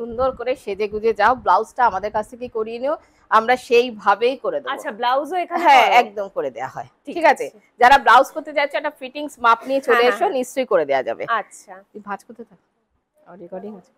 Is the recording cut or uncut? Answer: uncut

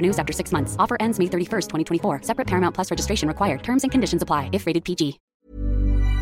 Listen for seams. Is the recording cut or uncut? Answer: cut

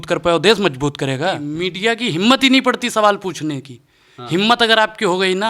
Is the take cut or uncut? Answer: cut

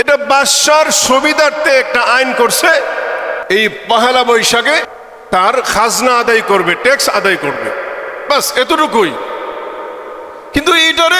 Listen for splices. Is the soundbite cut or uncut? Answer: cut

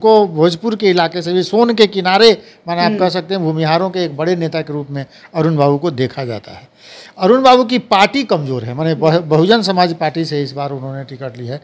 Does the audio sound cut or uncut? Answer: uncut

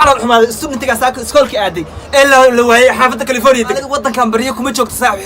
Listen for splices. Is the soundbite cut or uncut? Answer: cut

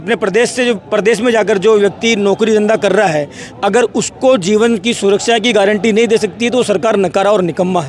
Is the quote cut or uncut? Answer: uncut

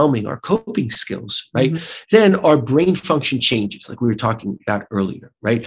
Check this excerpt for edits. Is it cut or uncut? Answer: uncut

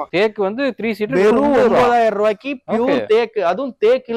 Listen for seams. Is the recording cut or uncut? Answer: uncut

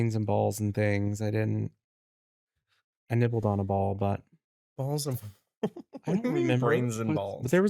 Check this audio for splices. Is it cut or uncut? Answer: uncut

